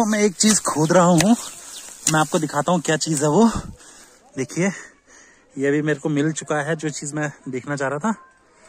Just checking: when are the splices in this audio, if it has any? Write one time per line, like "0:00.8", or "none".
none